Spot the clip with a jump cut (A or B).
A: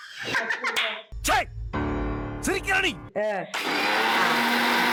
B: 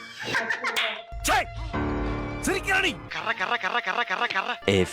B